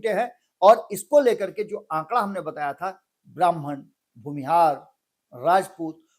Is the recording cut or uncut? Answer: uncut